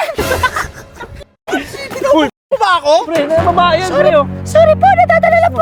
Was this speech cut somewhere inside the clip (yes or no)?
no